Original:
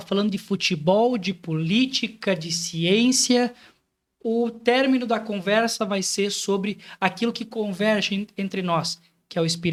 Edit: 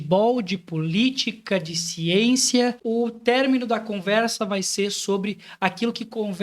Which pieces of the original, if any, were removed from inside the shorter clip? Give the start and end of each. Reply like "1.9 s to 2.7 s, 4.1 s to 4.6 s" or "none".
3.5 s to 4.2 s

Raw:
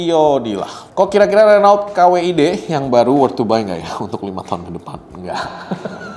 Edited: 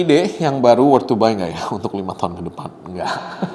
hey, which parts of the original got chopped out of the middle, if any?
none

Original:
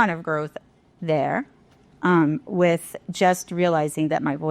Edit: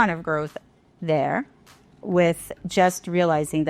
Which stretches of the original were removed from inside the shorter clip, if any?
2.0 s to 2.4 s

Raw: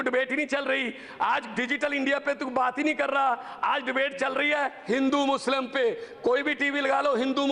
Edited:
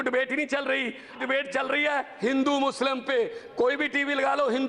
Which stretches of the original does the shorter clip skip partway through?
1.1 s to 3.8 s

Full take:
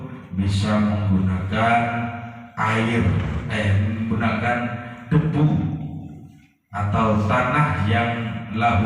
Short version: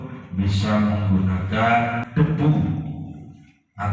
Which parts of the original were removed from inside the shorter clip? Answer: 2.0 s to 5.0 s

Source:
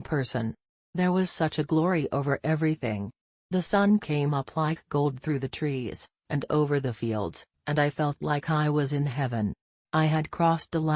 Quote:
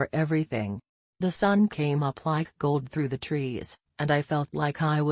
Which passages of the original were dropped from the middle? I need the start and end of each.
6.1 s to 7.5 s

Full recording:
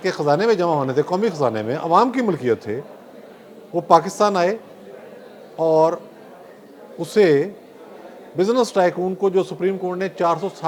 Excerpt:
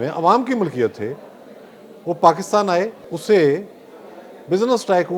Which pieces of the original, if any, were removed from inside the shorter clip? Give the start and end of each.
4.7 s to 6.9 s

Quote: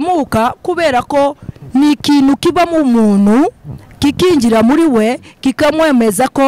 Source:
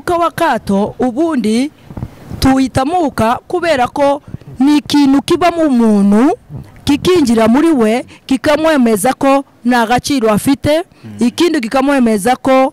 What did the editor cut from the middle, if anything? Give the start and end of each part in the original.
none

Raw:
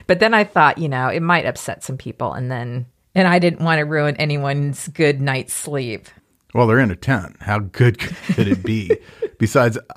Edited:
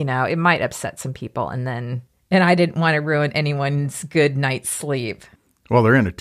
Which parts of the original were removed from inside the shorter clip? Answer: none

